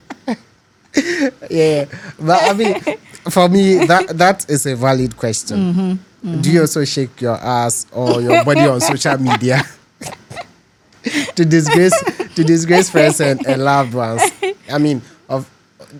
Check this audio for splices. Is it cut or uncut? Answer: uncut